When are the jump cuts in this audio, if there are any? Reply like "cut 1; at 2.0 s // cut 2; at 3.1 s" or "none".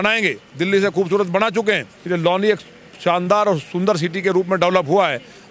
cut 1; at 1.9 s